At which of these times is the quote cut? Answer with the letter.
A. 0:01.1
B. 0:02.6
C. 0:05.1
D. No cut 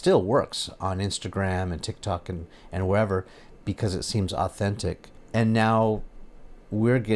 C